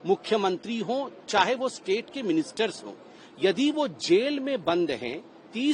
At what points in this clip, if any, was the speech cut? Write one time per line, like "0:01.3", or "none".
none